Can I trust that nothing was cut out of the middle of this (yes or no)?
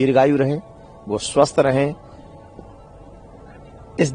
yes